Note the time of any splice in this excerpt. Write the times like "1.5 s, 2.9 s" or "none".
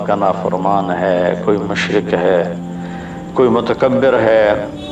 none